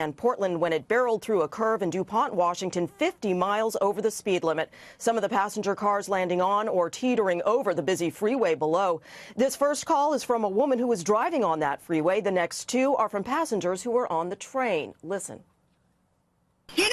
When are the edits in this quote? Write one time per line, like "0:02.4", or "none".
0:10.8

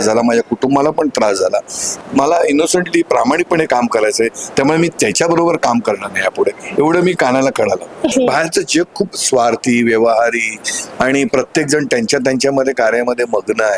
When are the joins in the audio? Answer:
0:02.0
0:08.1

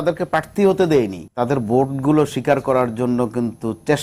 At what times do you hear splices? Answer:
0:01.2

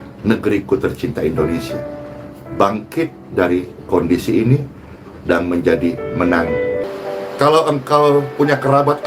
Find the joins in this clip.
0:06.8

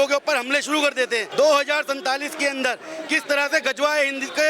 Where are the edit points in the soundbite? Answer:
0:01.3

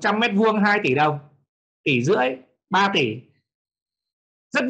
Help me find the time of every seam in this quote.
none

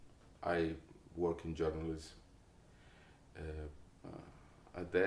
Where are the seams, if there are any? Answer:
none

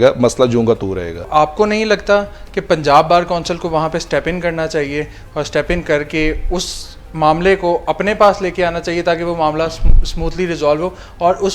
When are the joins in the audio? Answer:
0:01.2

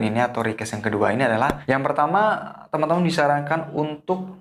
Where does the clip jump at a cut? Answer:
0:01.6

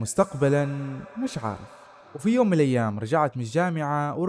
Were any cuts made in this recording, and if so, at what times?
none

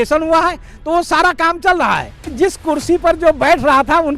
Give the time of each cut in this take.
0:02.3

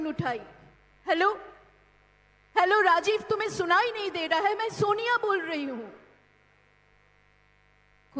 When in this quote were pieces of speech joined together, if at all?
none

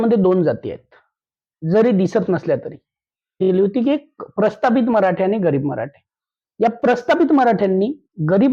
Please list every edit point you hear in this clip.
0:03.5

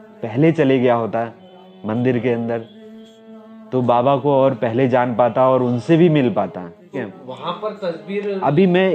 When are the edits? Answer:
0:07.2

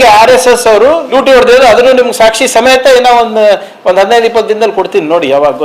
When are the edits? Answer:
0:01.0

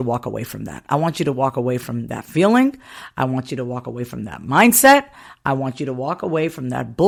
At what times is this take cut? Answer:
none

